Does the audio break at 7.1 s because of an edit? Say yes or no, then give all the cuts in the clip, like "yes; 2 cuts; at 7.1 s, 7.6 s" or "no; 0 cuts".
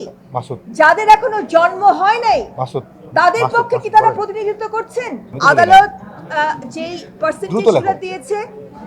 no; 1 cut; at 5.2 s